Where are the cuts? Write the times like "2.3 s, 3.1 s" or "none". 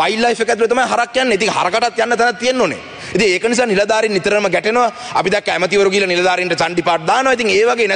none